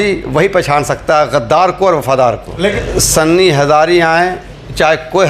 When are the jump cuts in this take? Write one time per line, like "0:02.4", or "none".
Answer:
0:02.8